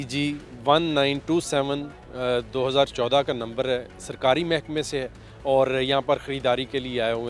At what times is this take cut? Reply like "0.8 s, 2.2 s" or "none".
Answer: none